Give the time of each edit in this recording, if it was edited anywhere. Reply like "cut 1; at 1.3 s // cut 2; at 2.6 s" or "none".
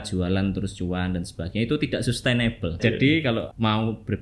cut 1; at 2.8 s